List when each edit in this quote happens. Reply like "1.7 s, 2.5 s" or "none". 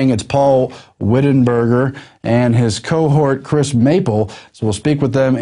4.4 s